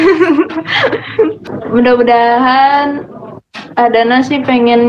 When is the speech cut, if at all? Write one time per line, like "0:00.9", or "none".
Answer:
0:01.5